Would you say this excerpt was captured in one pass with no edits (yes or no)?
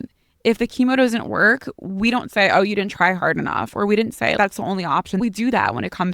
no